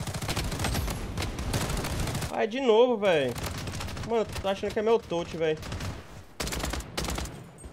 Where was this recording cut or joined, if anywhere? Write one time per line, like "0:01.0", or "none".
none